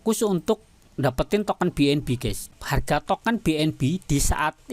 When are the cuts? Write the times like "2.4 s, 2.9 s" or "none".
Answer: 2.4 s